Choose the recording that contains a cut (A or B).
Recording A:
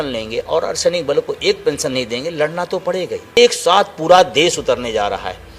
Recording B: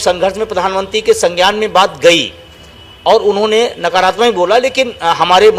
A